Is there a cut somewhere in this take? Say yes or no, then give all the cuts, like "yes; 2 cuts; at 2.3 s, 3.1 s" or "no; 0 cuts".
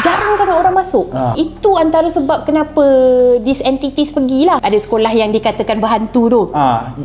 yes; 2 cuts; at 1.3 s, 4.6 s